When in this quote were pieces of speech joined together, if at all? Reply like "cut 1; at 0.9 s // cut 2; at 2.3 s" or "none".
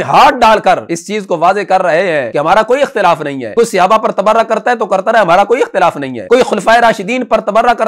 cut 1; at 0.9 s // cut 2; at 2.3 s // cut 3; at 3.4 s // cut 4; at 6.1 s